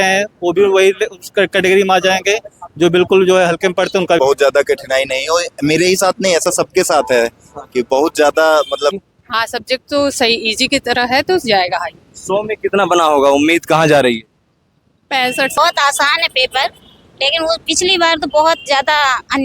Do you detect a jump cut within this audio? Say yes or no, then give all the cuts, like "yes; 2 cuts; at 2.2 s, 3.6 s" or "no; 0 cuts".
yes; 3 cuts; at 4.2 s, 9.0 s, 15.6 s